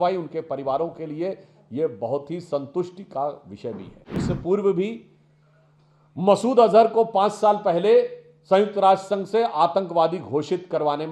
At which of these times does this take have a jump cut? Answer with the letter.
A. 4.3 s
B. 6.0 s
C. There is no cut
A